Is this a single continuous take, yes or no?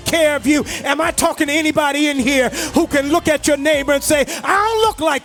yes